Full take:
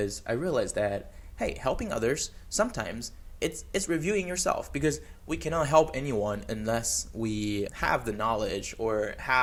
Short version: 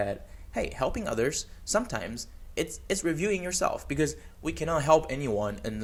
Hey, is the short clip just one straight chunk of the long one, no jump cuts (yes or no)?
yes